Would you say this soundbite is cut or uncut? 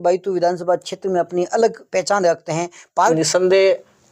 cut